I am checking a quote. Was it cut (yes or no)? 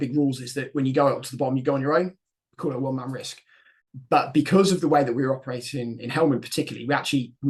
no